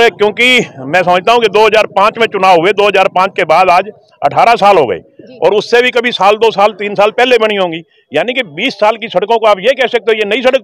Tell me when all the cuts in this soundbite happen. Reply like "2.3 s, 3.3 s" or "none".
none

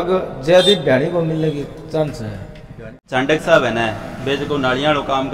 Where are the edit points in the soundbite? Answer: 3.1 s

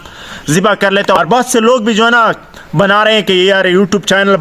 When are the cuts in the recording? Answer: 1.2 s

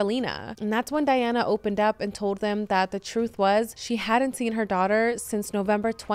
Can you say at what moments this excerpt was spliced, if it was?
3.8 s

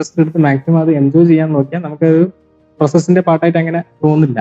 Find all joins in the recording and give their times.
none

